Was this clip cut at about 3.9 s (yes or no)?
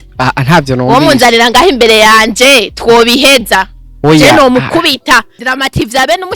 no